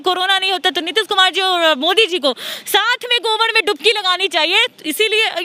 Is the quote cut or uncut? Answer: uncut